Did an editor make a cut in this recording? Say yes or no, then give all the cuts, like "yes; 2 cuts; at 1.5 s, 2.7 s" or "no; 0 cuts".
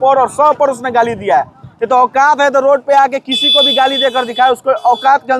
no; 0 cuts